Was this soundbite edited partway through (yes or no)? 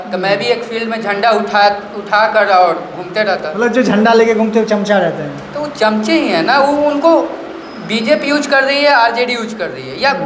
no